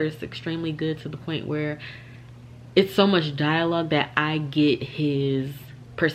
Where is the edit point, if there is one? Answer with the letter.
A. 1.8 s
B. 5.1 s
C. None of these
C